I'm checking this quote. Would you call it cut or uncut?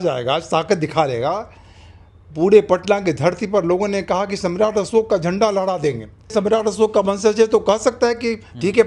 cut